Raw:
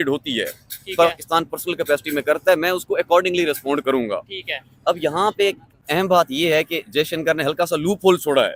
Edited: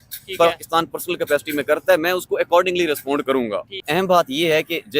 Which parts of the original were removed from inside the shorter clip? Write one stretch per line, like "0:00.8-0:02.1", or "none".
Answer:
0:04.3-0:05.7